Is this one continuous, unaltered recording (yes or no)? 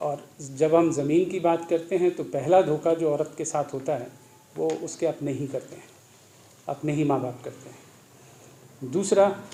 yes